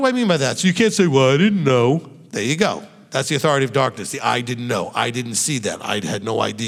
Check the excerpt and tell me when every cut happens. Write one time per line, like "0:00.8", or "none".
none